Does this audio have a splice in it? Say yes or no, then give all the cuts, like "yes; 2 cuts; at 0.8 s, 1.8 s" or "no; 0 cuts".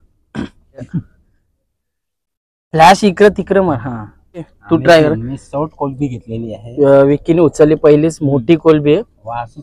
yes; 2 cuts; at 0.9 s, 4.6 s